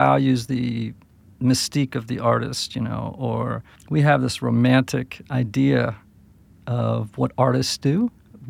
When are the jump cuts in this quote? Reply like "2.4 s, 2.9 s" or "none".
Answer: 3.7 s